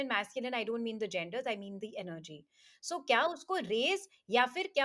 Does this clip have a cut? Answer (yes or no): no